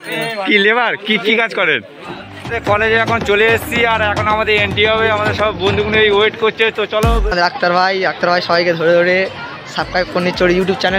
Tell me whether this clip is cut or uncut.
cut